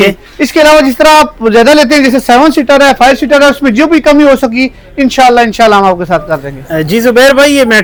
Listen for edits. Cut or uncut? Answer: uncut